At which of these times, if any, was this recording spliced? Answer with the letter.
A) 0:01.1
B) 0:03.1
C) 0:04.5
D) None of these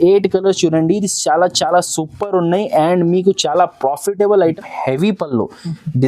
C